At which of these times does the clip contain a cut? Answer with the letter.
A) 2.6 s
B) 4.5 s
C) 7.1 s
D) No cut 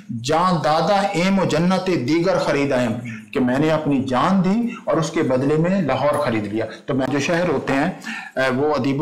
C